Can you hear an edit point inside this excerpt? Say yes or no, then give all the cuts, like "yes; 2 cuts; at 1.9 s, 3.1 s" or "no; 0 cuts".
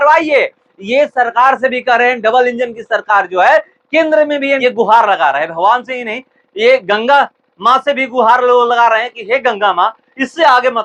yes; 1 cut; at 4.6 s